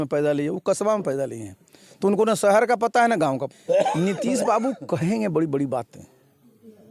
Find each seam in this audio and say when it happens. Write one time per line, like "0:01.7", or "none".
0:03.5